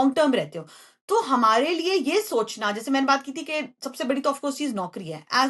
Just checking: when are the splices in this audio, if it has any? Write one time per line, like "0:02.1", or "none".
none